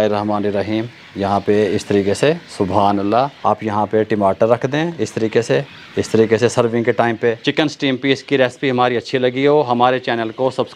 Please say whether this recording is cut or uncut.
cut